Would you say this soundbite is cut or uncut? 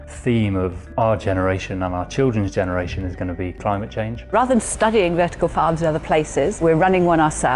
cut